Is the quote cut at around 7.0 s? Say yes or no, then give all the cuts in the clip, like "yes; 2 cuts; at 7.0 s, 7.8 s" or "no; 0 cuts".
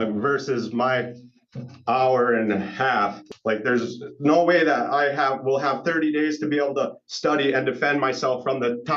no; 1 cut; at 3.2 s